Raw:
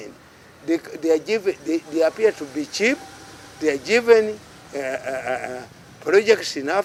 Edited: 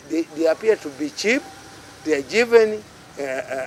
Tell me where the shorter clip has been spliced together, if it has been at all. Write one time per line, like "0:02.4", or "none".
none